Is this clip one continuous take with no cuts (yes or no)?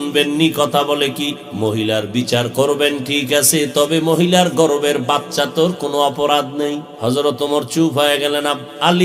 no